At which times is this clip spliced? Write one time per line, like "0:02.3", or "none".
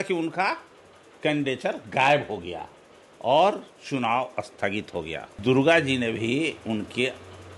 0:05.4